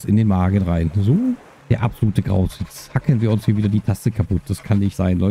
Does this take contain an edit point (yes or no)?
yes